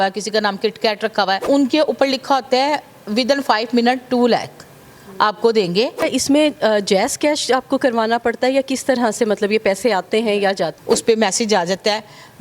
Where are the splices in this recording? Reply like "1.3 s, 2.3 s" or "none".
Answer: 1.4 s, 6.1 s, 10.8 s